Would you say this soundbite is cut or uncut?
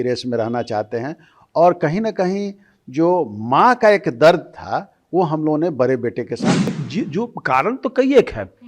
cut